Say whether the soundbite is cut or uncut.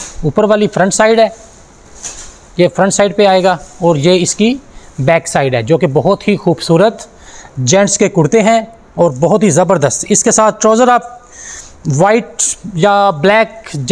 uncut